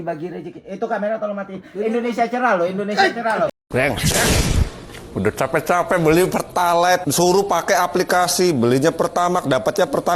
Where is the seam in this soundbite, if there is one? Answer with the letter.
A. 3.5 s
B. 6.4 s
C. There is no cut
A